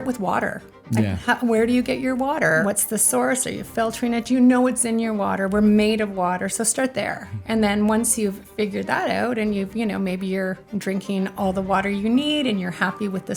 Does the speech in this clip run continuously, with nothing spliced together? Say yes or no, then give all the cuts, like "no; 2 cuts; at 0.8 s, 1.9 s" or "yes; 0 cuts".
no; 2 cuts; at 2.6 s, 7.3 s